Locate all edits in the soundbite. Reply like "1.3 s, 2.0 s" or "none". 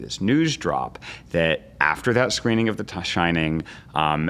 none